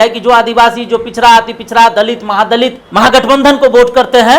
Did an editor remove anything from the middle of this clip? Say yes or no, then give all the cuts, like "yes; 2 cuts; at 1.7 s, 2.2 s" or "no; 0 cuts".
yes; 1 cut; at 2.8 s